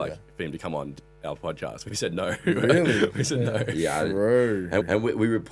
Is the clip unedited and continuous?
yes; 0 cuts

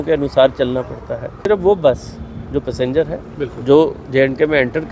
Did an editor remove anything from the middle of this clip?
yes; 1 cut; at 1.5 s

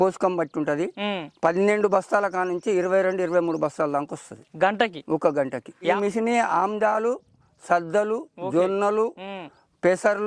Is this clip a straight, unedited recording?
no; 1 cut; at 5.8 s

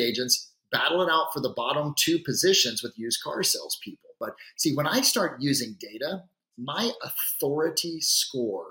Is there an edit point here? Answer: yes; 1 cut; at 4.2 s

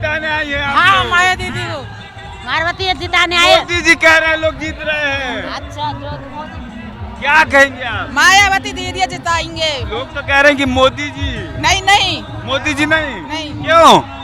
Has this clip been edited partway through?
no; 0 cuts

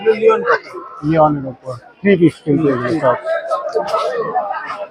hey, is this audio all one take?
yes; 0 cuts

